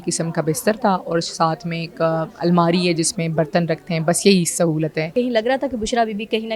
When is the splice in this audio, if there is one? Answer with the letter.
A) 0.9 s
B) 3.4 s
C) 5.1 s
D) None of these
C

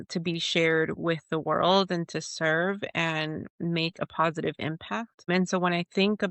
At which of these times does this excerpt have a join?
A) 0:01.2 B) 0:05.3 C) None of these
B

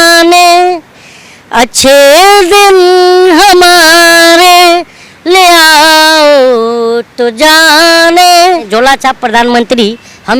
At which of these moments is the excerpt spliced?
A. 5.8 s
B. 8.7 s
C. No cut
B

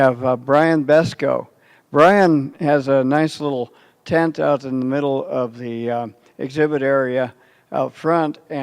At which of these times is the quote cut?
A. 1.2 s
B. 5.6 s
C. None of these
A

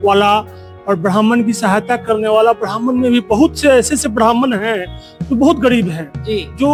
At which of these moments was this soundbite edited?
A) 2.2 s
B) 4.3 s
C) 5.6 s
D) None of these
D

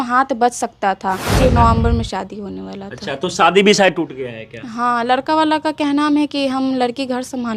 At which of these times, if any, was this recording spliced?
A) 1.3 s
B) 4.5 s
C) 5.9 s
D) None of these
A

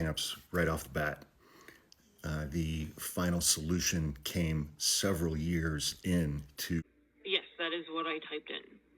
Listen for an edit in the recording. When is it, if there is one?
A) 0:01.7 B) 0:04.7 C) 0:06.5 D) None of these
C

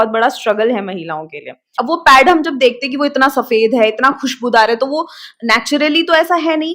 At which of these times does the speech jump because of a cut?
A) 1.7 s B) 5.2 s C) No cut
A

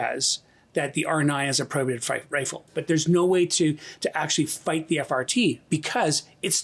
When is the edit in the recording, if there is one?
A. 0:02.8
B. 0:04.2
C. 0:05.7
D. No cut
A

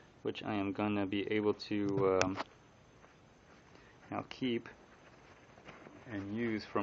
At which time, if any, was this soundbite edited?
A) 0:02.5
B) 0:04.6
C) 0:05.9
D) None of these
C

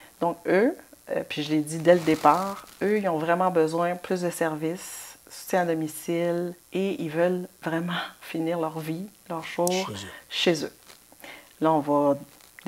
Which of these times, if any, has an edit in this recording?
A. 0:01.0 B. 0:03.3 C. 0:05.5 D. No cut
D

